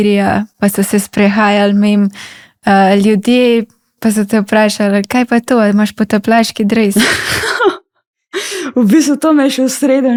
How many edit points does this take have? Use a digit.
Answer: 0